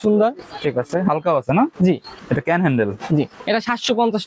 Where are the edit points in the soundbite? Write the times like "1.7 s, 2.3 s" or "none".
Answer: 2.1 s, 3.4 s